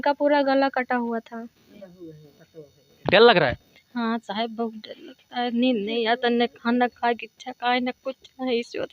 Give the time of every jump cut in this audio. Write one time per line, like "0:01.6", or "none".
0:01.7

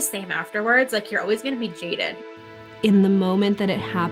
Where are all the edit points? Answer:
0:02.2

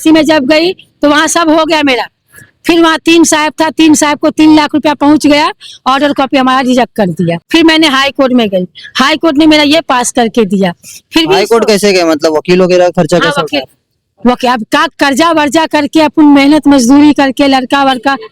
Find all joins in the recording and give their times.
0:07.4

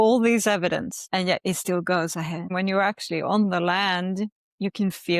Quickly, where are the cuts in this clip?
0:01.0
0:02.5

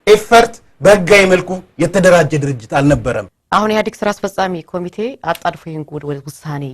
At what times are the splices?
0:03.3

